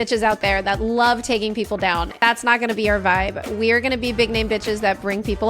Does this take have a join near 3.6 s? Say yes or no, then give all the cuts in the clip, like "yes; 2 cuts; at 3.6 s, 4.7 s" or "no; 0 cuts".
no; 1 cut; at 2.1 s